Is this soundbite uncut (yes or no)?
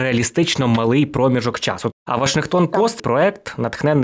no